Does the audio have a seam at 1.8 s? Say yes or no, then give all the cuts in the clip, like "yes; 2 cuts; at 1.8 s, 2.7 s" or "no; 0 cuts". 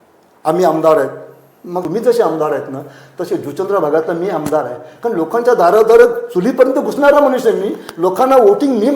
yes; 1 cut; at 1.8 s